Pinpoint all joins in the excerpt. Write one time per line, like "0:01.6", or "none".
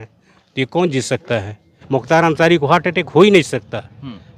0:01.8